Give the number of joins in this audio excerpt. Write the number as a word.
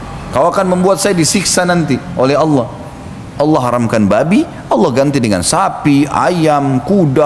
one